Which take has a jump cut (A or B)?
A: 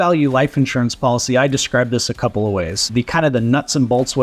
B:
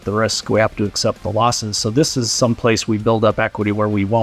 A